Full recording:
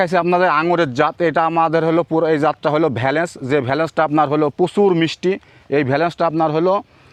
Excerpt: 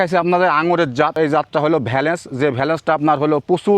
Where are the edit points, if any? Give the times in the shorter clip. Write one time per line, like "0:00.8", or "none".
0:01.2